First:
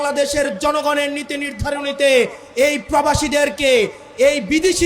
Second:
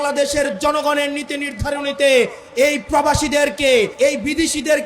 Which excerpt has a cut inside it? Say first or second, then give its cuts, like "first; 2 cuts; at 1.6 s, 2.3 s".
second; 1 cut; at 3.9 s